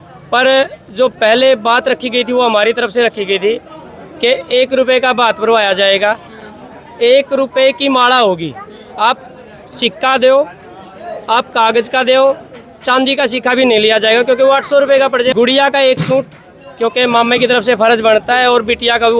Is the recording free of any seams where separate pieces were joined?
no; 1 cut; at 15.3 s

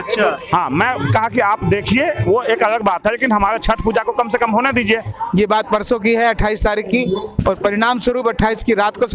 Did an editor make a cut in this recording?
yes; 1 cut; at 5.1 s

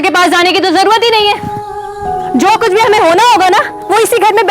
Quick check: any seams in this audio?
no; 0 cuts

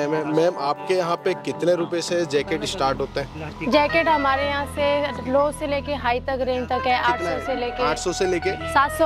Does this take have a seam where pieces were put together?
no; 0 cuts

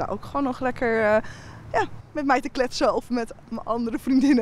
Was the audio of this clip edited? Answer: no; 0 cuts

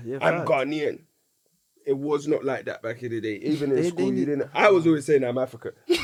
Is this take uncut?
yes; 0 cuts

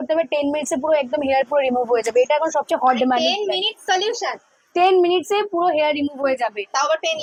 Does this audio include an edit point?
no; 0 cuts

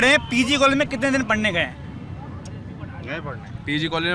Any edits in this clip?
no; 0 cuts

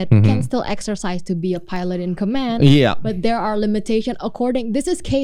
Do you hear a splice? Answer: no; 0 cuts

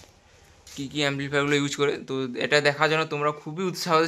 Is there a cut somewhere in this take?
no; 0 cuts

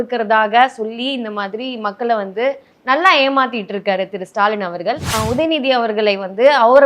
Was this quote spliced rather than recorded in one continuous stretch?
yes; 1 cut; at 5.1 s

